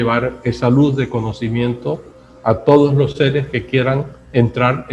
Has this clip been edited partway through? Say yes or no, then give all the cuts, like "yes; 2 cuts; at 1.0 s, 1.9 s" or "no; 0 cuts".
no; 0 cuts